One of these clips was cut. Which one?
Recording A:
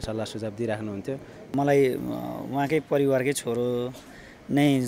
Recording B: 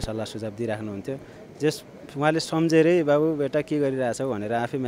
A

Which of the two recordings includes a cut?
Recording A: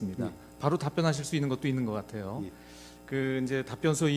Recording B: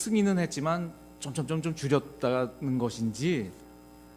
B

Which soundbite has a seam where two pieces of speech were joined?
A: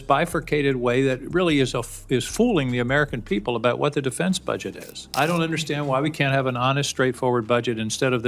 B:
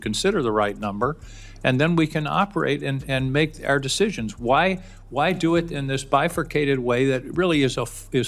A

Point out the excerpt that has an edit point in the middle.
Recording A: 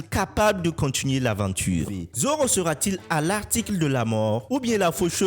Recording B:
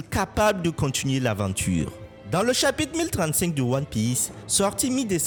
A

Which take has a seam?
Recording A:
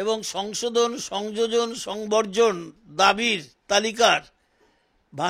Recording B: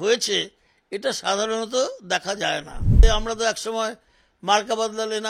B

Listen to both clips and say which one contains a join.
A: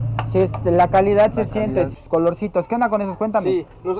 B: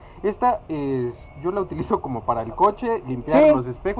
A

